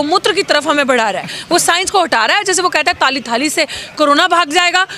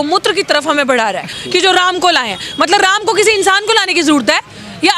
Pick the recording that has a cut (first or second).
second